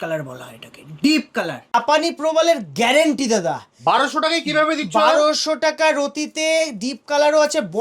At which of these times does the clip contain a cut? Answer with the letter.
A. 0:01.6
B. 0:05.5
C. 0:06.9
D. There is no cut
A